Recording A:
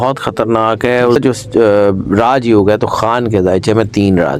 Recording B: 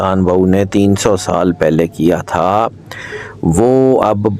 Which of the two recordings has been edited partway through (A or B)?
A